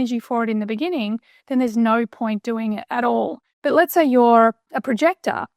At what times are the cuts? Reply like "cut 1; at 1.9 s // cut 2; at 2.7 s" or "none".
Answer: cut 1; at 3.4 s // cut 2; at 4.7 s